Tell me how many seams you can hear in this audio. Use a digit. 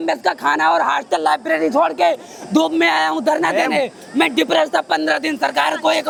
0